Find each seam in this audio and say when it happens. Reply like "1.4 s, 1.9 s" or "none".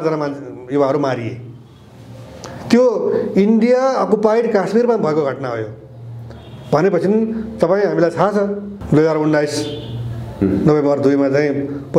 8.7 s